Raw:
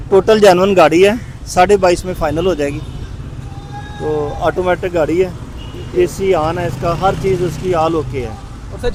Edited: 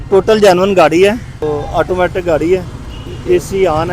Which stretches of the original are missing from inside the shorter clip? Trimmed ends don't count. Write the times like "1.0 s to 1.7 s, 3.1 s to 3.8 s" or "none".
1.3 s to 4.0 s